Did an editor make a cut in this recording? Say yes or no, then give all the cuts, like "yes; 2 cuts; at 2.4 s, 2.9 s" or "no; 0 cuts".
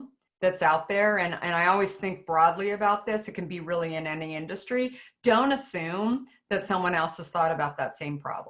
no; 0 cuts